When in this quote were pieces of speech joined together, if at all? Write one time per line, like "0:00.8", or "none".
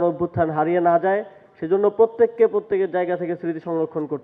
none